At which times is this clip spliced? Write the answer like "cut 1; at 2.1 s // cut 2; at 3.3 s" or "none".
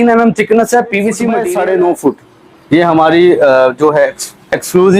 cut 1; at 1.3 s